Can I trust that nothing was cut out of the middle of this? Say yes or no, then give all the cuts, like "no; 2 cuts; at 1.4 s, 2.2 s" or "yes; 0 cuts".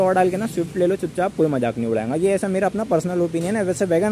yes; 0 cuts